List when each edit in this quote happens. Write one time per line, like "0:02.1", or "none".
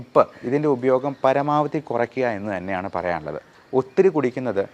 0:03.5